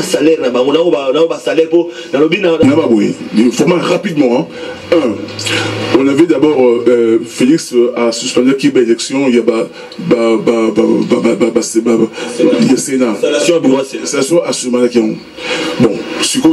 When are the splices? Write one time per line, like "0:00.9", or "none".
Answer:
0:02.6